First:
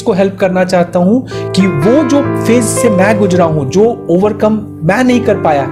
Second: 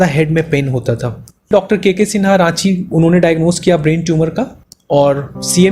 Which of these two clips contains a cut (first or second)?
second